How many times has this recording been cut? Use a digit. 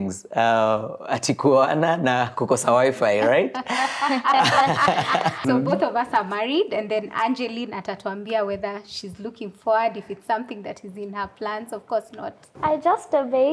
2